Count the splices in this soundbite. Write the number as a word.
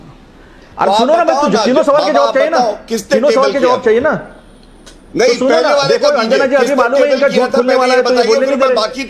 zero